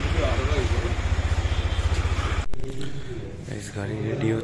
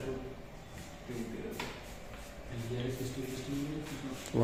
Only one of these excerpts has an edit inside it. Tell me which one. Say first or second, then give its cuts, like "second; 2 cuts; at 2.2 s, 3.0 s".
first; 1 cut; at 2.5 s